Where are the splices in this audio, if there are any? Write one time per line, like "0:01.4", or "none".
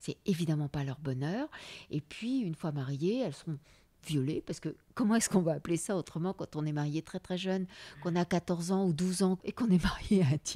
0:09.5